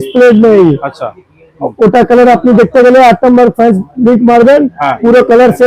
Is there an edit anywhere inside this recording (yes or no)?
no